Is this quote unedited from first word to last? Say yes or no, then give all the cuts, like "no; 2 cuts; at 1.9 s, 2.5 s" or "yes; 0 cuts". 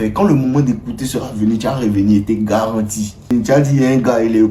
no; 1 cut; at 3.3 s